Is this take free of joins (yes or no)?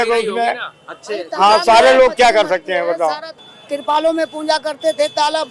no